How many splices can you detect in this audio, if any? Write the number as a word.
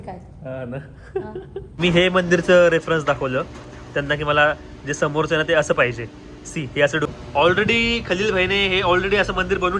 two